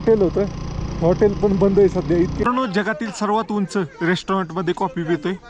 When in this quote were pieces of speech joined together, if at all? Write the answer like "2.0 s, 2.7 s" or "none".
2.5 s